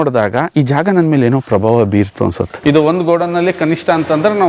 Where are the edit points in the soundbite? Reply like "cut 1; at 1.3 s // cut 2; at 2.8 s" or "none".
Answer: cut 1; at 2.6 s